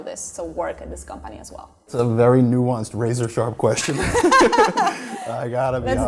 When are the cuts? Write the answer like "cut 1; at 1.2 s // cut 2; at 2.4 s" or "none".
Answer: cut 1; at 1.9 s